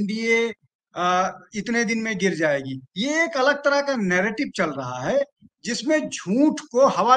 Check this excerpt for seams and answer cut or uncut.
uncut